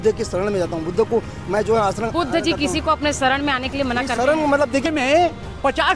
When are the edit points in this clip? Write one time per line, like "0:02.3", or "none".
0:04.9